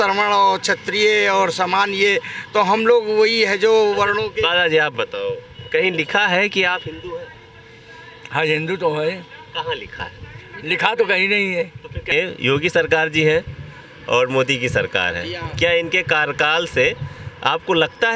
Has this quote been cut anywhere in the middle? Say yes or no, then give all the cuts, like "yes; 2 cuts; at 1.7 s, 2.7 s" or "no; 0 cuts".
yes; 1 cut; at 12.1 s